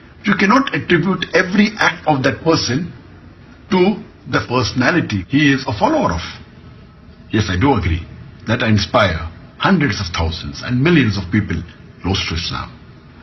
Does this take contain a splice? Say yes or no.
no